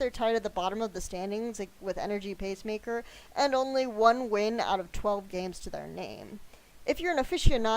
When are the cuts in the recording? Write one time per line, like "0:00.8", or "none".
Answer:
0:02.5